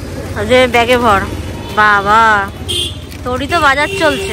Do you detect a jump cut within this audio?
no; 0 cuts

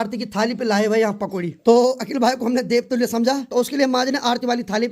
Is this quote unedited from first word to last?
no; 2 cuts; at 1.5 s, 3.4 s

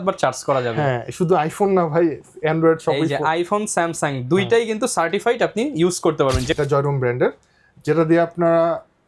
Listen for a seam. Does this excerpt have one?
yes; 1 cut; at 6.6 s

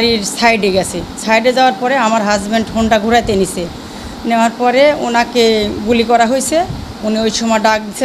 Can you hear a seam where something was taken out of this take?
no; 0 cuts

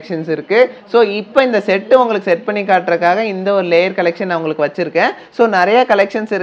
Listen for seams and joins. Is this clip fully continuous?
yes; 0 cuts

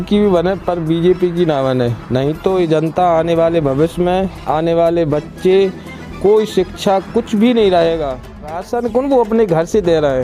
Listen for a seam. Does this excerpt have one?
yes; 1 cut; at 8.6 s

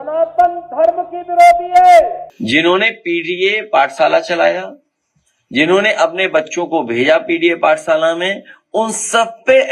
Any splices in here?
yes; 1 cut; at 2.3 s

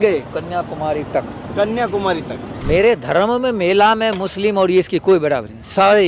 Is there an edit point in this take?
yes; 1 cut; at 2.5 s

